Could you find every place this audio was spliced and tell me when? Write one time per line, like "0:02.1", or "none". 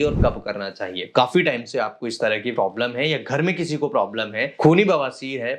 0:01.1